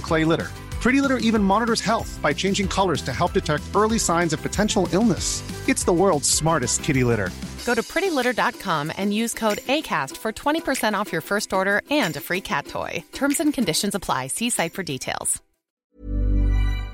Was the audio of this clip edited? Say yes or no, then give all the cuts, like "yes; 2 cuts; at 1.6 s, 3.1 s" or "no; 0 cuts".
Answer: yes; 1 cut; at 15.8 s